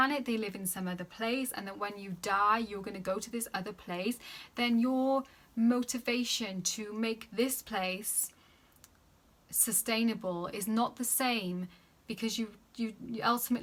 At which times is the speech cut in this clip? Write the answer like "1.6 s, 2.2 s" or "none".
none